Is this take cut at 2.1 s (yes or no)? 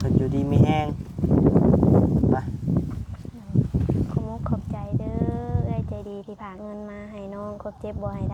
no